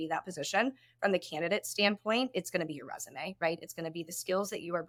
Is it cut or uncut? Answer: uncut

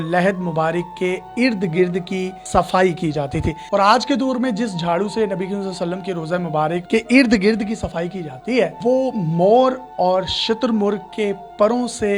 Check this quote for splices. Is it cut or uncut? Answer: cut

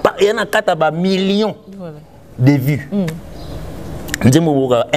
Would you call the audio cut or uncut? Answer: uncut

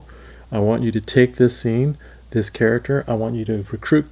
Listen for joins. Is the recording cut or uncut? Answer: uncut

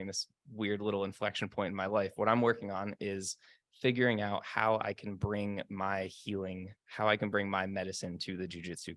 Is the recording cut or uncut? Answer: uncut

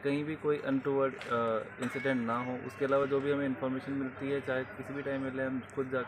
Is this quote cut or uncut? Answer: uncut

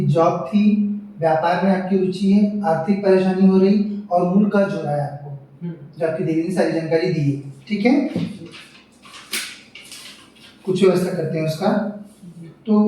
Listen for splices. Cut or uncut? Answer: uncut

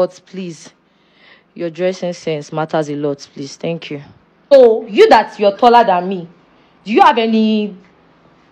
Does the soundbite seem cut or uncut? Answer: cut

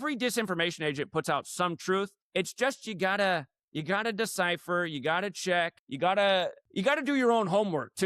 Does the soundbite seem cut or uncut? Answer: cut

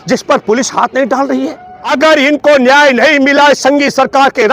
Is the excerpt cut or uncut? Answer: cut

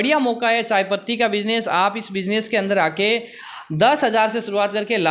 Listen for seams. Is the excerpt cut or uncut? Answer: uncut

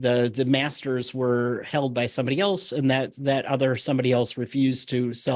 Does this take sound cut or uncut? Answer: uncut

